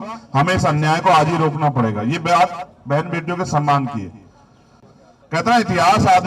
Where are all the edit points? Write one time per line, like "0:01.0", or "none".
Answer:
0:04.8